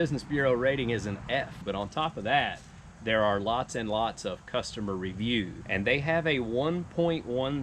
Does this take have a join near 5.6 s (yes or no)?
yes